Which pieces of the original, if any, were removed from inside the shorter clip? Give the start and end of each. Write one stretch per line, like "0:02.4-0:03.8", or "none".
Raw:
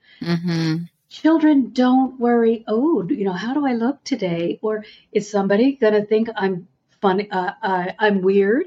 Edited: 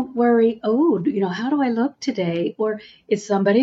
none